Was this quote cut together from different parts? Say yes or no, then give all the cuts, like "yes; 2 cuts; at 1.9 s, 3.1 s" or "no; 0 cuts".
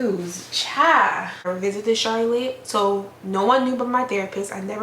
yes; 1 cut; at 1.4 s